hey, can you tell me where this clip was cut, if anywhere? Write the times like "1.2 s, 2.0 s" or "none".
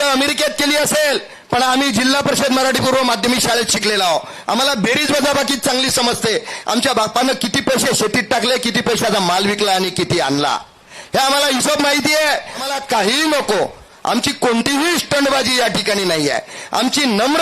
12.7 s